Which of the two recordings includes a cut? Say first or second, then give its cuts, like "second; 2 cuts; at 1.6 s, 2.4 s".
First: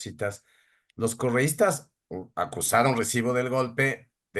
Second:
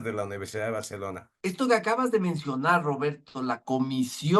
second; 1 cut; at 1.2 s